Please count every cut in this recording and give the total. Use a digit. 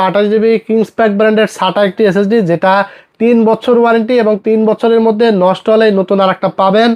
0